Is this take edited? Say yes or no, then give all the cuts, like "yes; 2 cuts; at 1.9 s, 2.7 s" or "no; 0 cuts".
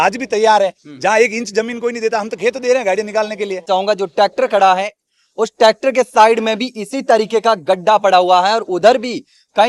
yes; 1 cut; at 3.7 s